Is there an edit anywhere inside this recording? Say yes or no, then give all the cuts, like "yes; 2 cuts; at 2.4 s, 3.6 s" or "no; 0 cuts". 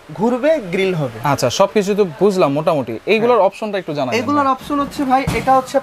no; 0 cuts